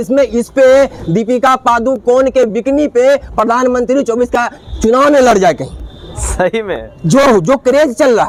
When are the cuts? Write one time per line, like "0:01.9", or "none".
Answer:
none